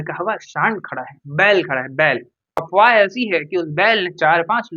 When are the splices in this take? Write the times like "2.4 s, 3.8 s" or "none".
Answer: 2.6 s